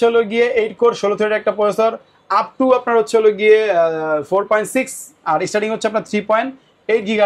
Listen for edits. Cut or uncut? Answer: uncut